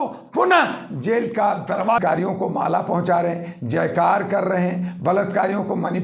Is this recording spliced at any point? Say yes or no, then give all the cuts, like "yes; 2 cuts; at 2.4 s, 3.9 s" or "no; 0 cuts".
yes; 1 cut; at 2.0 s